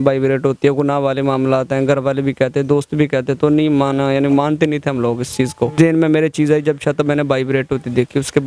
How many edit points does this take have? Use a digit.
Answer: 1